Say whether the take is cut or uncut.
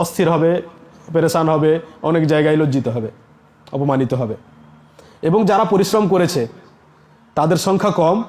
uncut